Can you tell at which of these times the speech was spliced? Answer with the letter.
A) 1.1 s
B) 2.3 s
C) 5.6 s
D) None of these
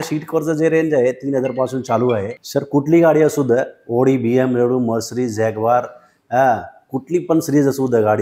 B